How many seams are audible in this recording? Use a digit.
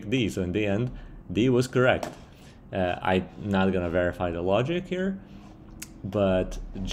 0